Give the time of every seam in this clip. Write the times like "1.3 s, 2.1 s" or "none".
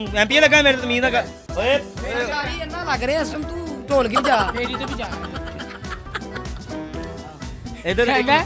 none